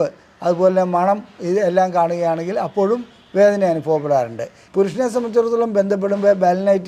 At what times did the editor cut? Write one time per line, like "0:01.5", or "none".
0:04.6

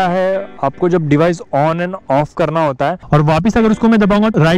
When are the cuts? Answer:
0:03.0

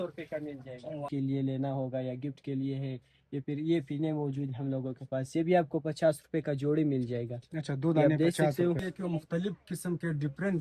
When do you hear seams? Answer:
0:01.1
0:08.9

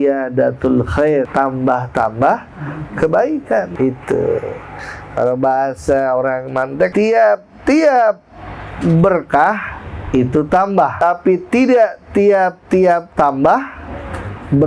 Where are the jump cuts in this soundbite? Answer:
0:01.3
0:03.7
0:06.9
0:11.0

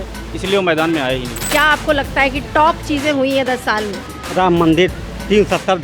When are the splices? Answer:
0:01.5

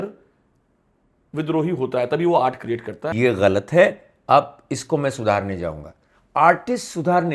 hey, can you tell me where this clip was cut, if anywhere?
0:03.1

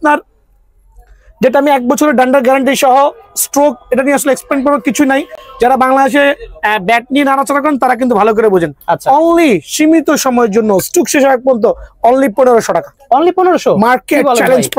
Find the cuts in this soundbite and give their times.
none

